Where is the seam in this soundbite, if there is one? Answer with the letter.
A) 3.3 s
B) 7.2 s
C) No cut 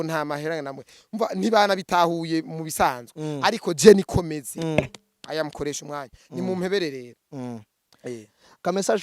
C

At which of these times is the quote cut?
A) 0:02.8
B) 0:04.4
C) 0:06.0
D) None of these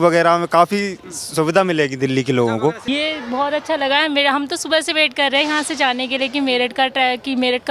A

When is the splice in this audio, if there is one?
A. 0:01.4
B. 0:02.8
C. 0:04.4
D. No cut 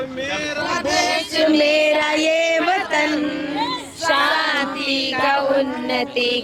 D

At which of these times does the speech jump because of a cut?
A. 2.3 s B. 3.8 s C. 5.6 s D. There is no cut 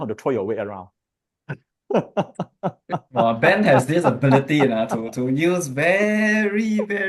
D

